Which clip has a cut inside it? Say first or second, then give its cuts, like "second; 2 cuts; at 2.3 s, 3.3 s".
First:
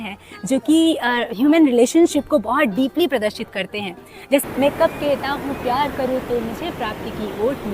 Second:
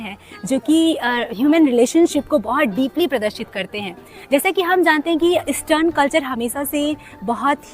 first; 1 cut; at 4.4 s